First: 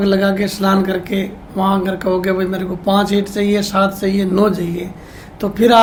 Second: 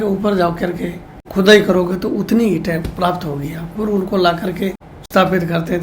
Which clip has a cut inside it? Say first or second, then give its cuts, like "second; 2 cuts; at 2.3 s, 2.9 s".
second; 2 cuts; at 1.2 s, 4.9 s